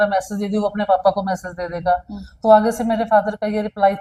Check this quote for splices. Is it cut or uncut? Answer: uncut